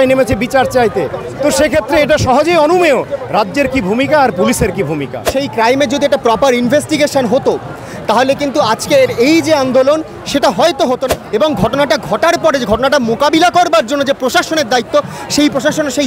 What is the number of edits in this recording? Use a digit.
2